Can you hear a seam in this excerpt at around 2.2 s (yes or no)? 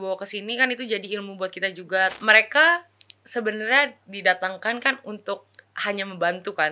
yes